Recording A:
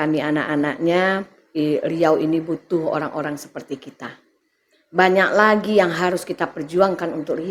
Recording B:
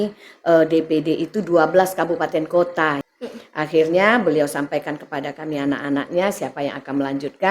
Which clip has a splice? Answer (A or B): B